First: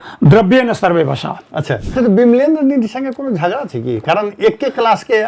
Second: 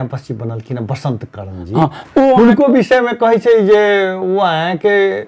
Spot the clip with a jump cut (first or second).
first